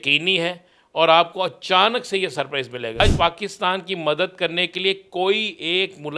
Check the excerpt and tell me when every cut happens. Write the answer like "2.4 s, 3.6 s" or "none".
3.0 s